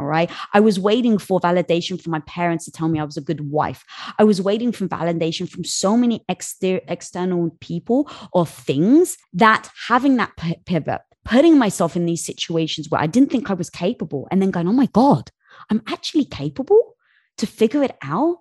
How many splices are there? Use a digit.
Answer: 1